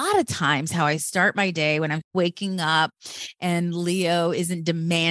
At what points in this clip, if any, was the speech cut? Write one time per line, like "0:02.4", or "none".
0:02.1